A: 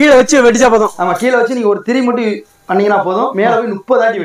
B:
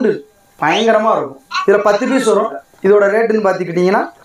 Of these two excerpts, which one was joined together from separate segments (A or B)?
B